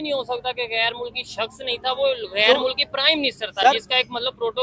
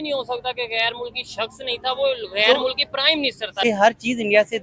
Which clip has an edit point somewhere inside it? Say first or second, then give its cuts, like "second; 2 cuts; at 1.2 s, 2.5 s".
second; 1 cut; at 3.6 s